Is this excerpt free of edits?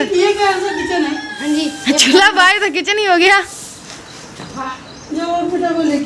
no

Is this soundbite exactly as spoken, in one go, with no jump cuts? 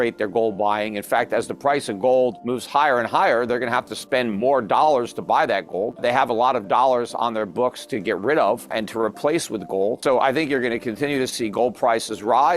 no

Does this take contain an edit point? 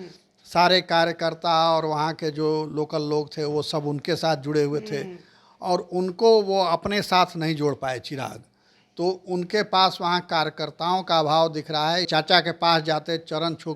yes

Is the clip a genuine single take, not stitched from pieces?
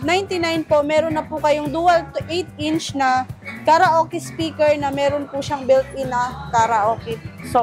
yes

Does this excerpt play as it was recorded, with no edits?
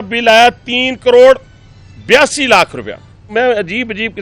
no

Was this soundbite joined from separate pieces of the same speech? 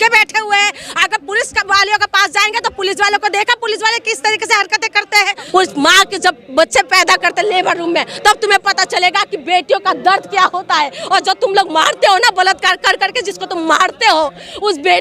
yes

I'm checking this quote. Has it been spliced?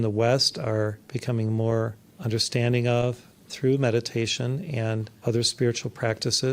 yes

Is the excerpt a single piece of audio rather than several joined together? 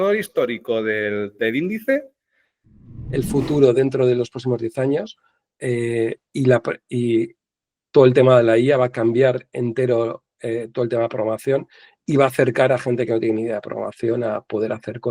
no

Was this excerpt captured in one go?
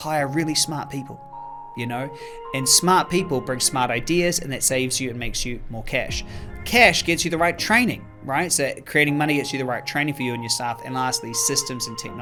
yes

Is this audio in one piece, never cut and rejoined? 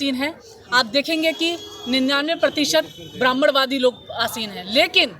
yes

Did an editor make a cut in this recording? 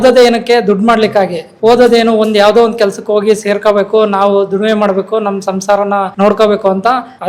no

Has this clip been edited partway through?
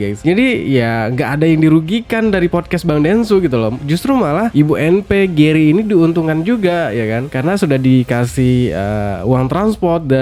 no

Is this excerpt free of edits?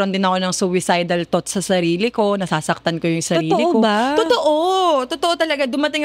yes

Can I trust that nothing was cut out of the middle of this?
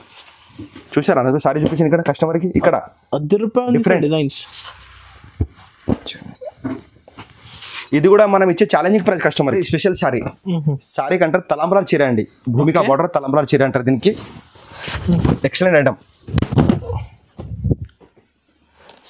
no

